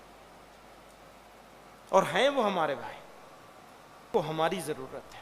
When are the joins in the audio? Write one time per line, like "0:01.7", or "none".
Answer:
0:04.1